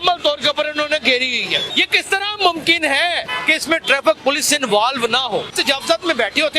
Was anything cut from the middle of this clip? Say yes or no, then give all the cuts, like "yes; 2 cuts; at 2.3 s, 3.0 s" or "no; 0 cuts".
yes; 3 cuts; at 1.7 s, 3.3 s, 5.5 s